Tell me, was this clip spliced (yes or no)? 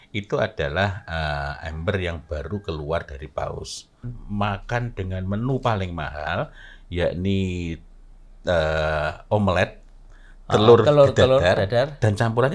yes